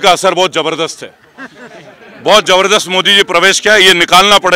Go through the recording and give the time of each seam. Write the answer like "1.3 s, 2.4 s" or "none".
none